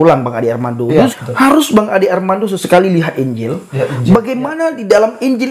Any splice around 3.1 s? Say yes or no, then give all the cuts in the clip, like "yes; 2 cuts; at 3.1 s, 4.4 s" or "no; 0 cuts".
no; 1 cut; at 1.1 s